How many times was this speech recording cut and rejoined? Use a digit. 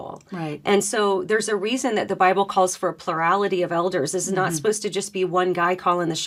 0